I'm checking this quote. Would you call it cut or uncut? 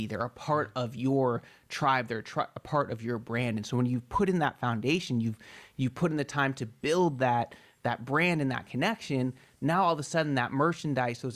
uncut